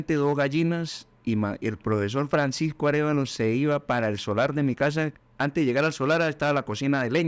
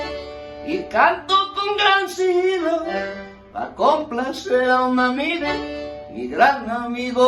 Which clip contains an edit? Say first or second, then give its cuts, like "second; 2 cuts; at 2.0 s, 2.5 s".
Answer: first; 1 cut; at 5.2 s